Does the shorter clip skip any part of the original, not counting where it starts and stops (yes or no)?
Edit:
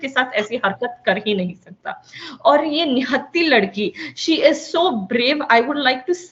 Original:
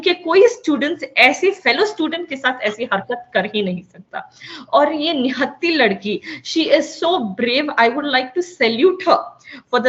no